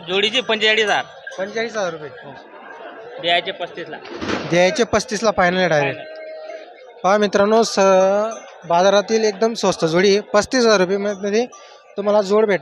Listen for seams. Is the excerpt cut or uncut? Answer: uncut